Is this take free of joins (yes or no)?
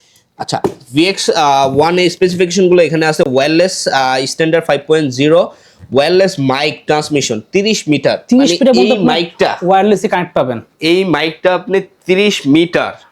yes